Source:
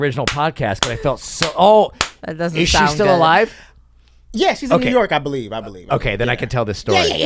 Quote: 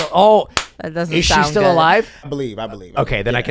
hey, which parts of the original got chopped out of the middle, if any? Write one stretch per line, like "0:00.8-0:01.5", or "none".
0:03.8-0:05.3